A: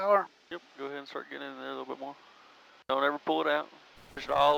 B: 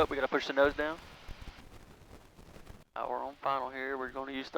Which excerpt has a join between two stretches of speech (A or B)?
B